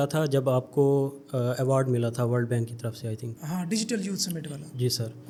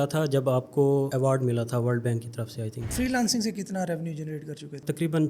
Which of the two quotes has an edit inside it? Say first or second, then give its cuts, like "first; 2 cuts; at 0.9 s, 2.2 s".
second; 2 cuts; at 1.1 s, 2.9 s